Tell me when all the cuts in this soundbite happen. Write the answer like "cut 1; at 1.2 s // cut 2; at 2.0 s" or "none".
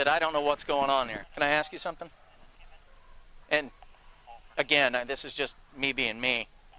cut 1; at 1.2 s